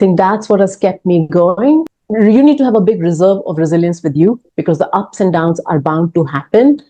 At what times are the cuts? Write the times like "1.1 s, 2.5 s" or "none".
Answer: 2.0 s